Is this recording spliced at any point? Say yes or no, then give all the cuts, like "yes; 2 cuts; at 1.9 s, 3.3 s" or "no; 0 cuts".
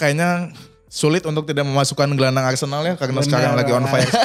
no; 0 cuts